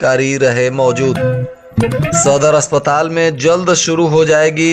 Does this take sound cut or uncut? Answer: cut